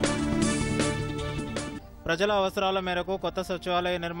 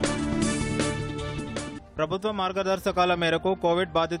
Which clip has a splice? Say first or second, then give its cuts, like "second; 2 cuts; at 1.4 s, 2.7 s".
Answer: first; 1 cut; at 1.8 s